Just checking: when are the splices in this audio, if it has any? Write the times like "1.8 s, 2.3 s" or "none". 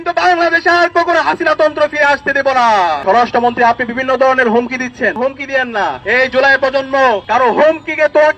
3.0 s, 6.0 s, 7.2 s